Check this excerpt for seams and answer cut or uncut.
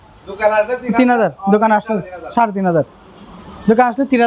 uncut